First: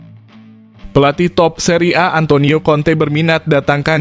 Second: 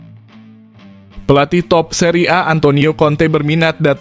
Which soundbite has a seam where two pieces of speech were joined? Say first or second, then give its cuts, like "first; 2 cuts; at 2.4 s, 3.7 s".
first; 1 cut; at 0.9 s